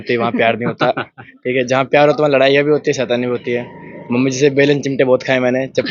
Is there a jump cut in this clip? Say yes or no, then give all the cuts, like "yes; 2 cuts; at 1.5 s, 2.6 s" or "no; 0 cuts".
no; 0 cuts